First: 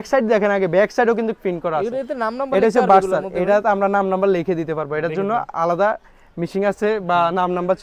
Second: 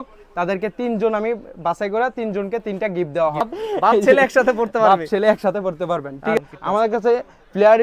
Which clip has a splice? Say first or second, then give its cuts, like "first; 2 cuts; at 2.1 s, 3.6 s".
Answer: second; 2 cuts; at 3.6 s, 6.4 s